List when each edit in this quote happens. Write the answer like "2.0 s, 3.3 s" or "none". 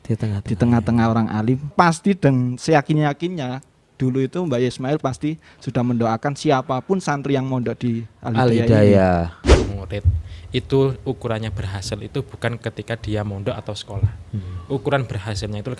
1.7 s, 9.6 s